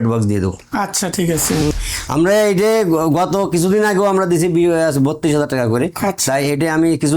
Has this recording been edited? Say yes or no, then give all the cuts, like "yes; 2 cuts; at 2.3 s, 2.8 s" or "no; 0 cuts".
yes; 1 cut; at 1.7 s